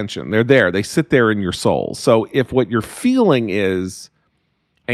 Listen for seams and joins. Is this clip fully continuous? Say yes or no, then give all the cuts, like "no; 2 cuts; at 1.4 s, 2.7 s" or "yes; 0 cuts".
yes; 0 cuts